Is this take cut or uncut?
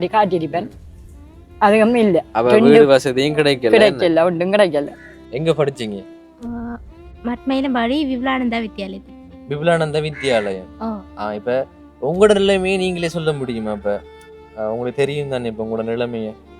cut